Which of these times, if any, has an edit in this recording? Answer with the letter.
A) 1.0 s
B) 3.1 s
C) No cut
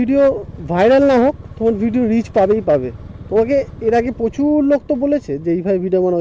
C